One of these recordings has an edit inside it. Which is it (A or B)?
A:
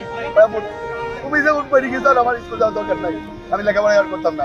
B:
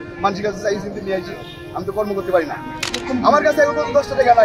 B